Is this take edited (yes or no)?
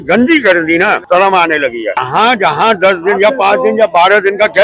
yes